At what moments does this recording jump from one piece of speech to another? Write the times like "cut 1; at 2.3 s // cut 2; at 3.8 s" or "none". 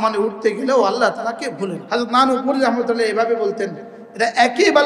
cut 1; at 1.8 s

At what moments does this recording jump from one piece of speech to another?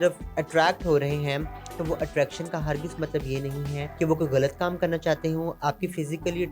cut 1; at 3.8 s // cut 2; at 5.6 s

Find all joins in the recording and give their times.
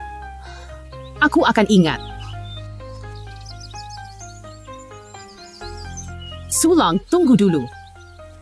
cut 1; at 2.0 s // cut 2; at 4.2 s // cut 3; at 6.6 s // cut 4; at 7.7 s

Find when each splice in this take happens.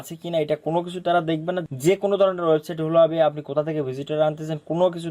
cut 1; at 1.6 s

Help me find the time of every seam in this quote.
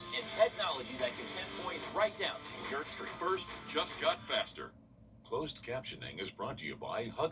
cut 1; at 4.7 s

